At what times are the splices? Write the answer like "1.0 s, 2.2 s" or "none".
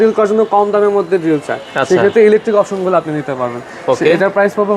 none